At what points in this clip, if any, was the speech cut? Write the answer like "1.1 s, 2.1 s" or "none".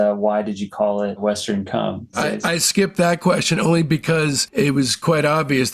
2.3 s, 4.4 s